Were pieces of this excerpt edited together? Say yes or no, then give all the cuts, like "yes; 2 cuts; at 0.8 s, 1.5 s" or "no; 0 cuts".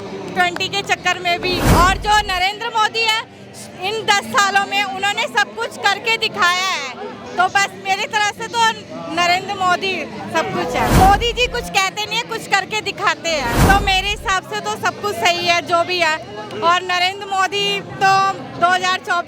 yes; 3 cuts; at 1.7 s, 10.9 s, 13.6 s